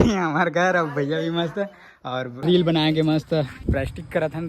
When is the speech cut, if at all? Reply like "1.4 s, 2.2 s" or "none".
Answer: 2.3 s

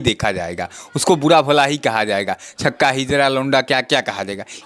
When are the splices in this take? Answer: none

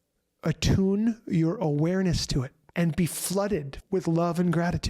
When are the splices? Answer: 2.6 s, 3.7 s

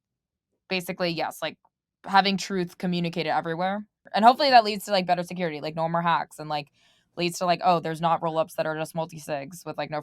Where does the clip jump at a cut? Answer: 4.0 s

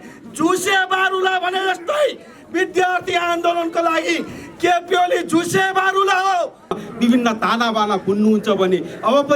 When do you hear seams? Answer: 6.8 s

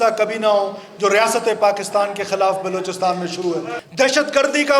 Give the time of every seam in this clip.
3.8 s

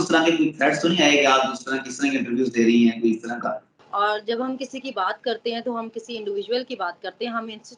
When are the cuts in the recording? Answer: 3.7 s

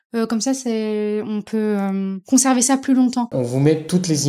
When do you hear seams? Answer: 2.2 s, 3.3 s

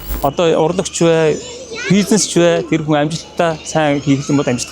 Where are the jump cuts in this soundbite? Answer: none

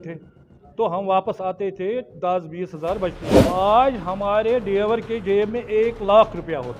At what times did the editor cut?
3.3 s

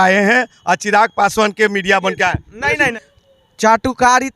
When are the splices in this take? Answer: 2.9 s

